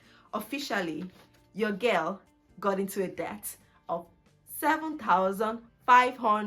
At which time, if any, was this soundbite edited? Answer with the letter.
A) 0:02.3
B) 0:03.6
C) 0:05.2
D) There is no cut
D